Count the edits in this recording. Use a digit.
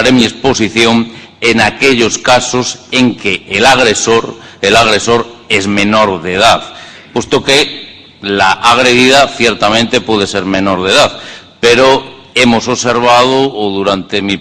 1